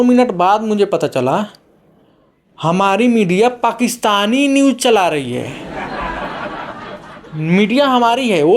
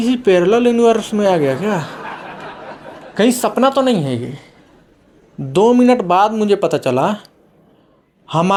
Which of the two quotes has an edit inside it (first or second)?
first